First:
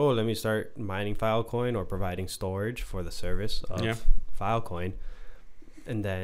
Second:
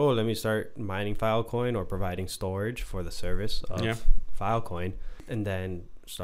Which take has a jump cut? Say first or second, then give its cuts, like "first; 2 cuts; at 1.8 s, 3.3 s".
second; 1 cut; at 5.1 s